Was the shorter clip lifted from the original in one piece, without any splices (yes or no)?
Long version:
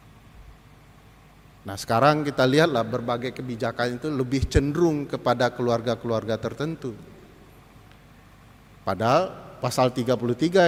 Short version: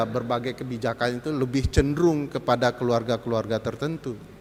yes